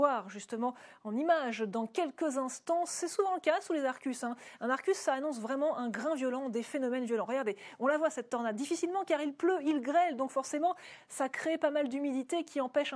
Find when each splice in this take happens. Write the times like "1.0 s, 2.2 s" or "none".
6.1 s